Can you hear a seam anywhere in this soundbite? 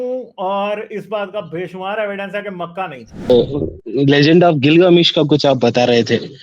yes; 1 cut; at 3.3 s

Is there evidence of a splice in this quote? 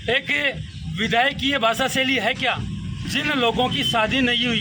yes; 1 cut; at 3.0 s

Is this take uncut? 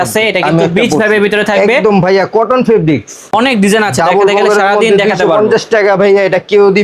no; 1 cut; at 3.3 s

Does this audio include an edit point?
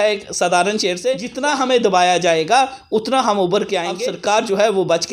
yes; 2 cuts; at 1.3 s, 4.0 s

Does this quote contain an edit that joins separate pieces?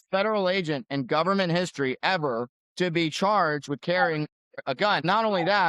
yes; 2 cuts; at 2.6 s, 4.8 s

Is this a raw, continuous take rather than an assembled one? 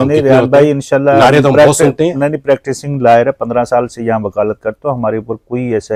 yes; 0 cuts

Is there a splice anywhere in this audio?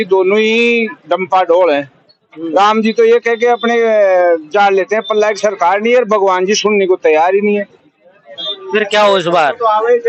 no; 0 cuts

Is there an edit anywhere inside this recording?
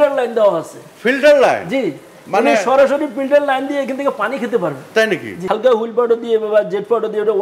yes; 1 cut; at 5.3 s

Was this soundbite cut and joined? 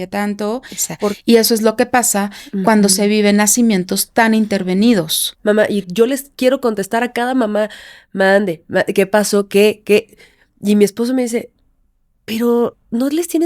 yes; 2 cuts; at 1.2 s, 5.4 s

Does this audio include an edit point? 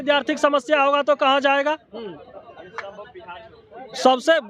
no; 0 cuts

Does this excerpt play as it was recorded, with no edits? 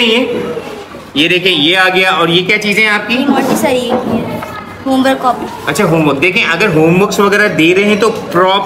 yes; 0 cuts

